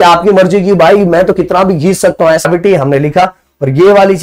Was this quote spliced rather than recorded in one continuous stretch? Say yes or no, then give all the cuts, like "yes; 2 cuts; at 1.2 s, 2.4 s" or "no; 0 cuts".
yes; 1 cut; at 2.4 s